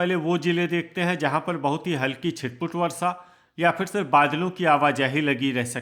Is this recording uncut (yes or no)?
yes